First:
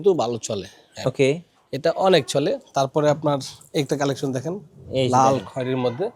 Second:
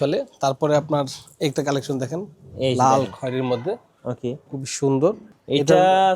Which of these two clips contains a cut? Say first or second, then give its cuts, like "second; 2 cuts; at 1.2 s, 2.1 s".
second; 1 cut; at 5.3 s